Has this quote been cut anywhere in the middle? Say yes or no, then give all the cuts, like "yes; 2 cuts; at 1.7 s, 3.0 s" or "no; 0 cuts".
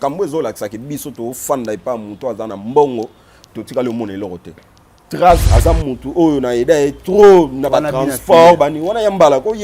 yes; 1 cut; at 5.4 s